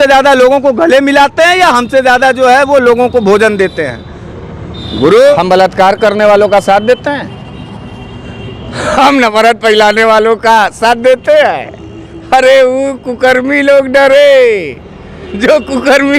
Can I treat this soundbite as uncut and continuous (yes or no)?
no